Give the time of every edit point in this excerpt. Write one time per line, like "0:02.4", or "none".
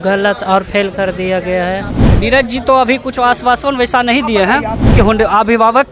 0:02.0
0:04.9